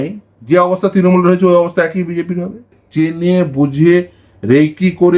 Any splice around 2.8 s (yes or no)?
yes